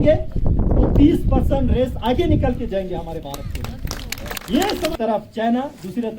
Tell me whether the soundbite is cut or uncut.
cut